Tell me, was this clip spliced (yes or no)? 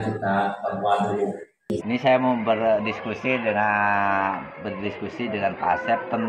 yes